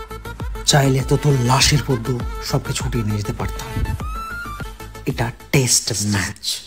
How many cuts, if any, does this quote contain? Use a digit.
1